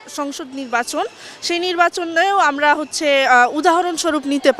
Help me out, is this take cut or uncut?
uncut